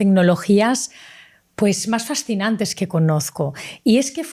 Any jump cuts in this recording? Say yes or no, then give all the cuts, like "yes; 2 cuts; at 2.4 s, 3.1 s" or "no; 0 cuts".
no; 0 cuts